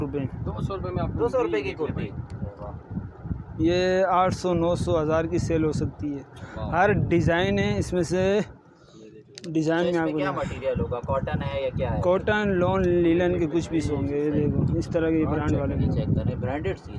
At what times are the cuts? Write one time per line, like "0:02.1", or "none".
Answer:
none